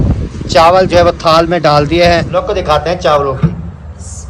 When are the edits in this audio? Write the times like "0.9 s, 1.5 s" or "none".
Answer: 2.4 s